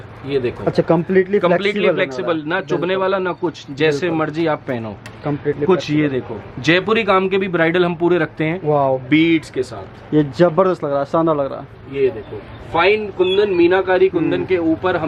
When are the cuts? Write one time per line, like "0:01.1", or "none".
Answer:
none